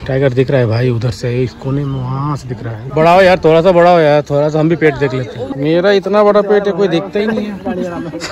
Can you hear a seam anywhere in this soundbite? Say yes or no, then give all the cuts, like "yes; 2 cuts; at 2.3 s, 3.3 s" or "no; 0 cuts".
yes; 2 cuts; at 2.8 s, 5.4 s